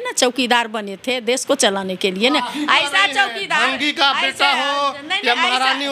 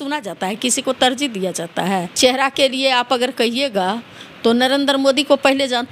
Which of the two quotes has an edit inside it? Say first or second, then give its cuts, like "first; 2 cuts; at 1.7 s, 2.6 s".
second; 1 cut; at 2.1 s